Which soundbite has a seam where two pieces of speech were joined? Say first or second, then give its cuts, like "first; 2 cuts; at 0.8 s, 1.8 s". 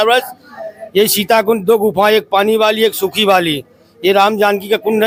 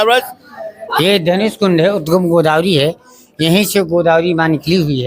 second; 1 cut; at 1.0 s